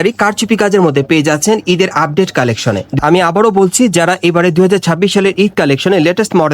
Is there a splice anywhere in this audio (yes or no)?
yes